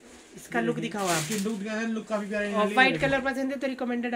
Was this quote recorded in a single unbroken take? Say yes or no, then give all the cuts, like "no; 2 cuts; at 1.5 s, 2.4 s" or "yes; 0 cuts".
yes; 0 cuts